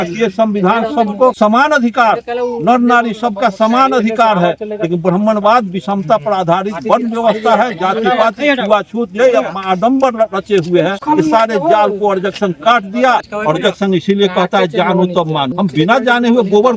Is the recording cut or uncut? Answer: cut